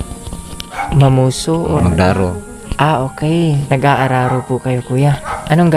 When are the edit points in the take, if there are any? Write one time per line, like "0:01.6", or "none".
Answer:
0:01.8
0:03.6